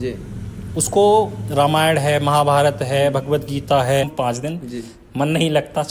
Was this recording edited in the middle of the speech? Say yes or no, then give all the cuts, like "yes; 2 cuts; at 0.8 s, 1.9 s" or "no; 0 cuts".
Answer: yes; 1 cut; at 4.1 s